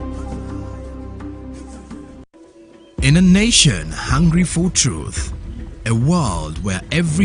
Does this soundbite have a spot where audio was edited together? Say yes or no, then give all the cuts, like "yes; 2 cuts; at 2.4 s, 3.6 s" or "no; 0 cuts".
yes; 1 cut; at 2.3 s